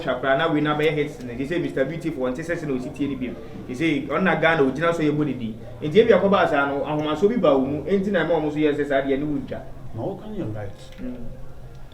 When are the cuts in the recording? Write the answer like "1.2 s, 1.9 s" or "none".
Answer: none